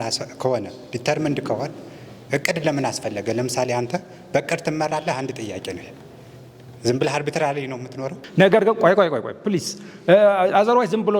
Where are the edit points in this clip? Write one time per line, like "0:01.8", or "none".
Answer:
0:08.2